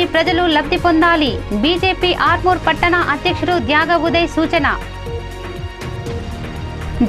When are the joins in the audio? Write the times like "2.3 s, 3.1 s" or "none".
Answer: none